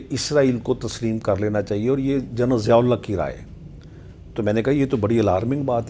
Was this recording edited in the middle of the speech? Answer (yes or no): no